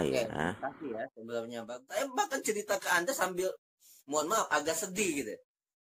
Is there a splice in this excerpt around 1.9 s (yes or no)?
yes